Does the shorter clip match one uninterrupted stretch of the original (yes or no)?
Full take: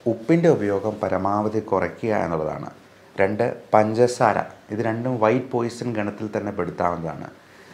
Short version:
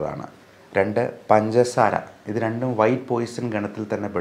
yes